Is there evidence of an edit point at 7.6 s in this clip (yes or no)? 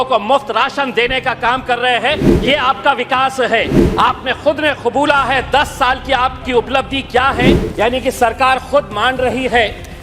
yes